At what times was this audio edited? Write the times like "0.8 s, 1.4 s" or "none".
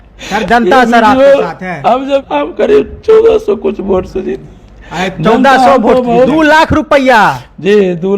2.3 s, 6.3 s